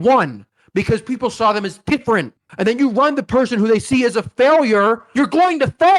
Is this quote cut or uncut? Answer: cut